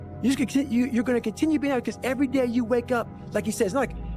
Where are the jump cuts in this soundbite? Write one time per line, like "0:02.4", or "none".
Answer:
none